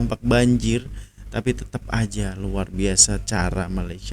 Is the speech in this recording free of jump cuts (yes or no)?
yes